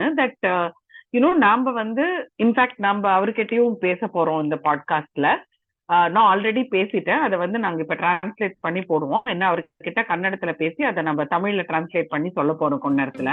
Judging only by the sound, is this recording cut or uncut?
uncut